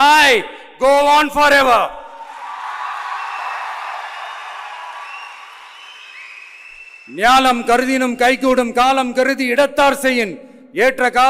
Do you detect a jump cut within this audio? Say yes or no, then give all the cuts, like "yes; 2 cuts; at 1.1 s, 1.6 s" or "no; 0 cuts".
no; 0 cuts